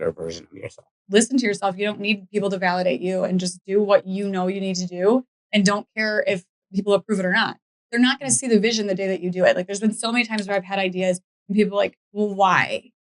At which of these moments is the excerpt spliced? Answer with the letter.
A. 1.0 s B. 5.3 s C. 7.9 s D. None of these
A